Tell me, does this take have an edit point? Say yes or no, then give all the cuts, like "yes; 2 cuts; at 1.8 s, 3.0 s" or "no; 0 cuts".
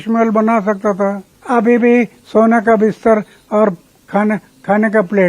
yes; 1 cut; at 1.3 s